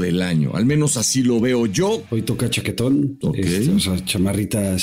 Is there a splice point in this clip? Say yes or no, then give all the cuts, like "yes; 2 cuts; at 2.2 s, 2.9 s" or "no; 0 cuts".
yes; 2 cuts; at 2.0 s, 3.6 s